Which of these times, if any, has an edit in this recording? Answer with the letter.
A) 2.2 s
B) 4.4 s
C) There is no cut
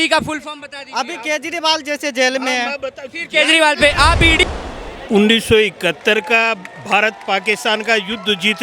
B